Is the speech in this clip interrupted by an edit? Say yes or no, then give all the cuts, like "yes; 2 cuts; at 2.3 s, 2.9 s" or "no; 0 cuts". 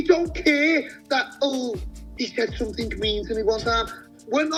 no; 0 cuts